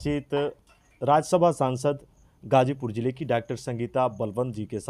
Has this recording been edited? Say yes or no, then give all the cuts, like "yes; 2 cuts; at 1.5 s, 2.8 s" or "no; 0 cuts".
no; 0 cuts